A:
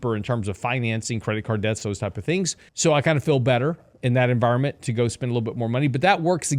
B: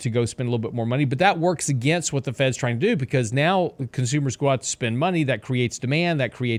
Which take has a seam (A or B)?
A